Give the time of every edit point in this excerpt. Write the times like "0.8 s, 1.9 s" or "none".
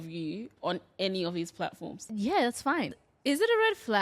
2.0 s, 2.9 s